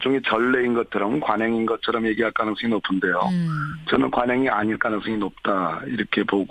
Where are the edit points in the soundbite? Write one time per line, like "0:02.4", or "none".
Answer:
0:03.7